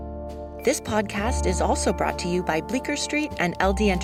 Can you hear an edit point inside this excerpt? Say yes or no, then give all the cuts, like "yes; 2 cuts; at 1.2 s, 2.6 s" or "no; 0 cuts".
no; 0 cuts